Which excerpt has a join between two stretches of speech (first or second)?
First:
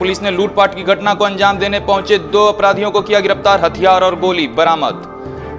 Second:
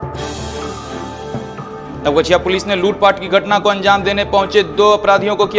second